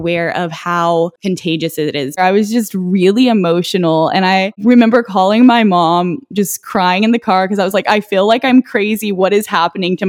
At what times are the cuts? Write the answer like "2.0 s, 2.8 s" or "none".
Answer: 2.2 s, 4.6 s